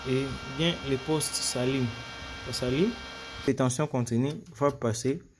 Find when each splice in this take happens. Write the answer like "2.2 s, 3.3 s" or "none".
3.5 s

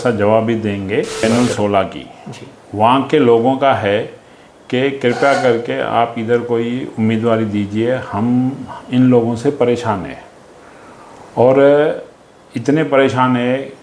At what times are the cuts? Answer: 1.2 s

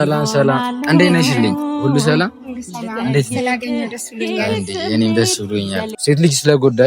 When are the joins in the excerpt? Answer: 6.0 s

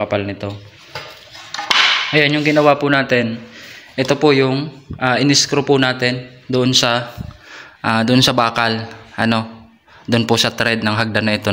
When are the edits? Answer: none

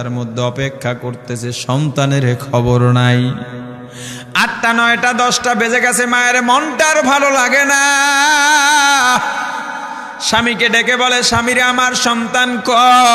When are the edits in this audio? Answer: none

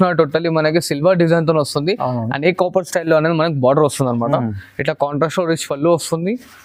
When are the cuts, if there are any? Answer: none

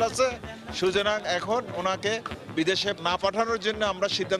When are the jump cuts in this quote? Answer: 3.0 s

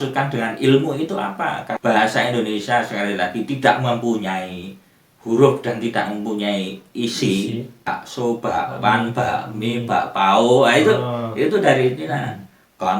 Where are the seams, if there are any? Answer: 1.7 s, 7.9 s

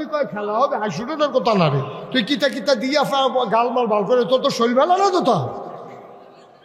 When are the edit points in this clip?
2.0 s

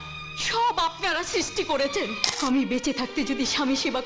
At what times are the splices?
2.2 s

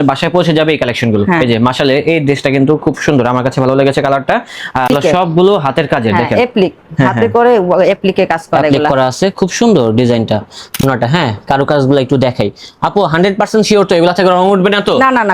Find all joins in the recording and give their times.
4.9 s, 10.8 s

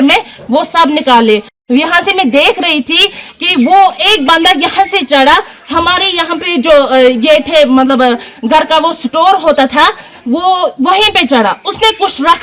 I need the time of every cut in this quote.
1.5 s

